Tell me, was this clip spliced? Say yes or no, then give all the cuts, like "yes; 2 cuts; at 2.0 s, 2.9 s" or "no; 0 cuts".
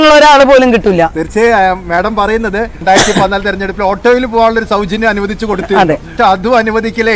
yes; 2 cuts; at 2.8 s, 6.1 s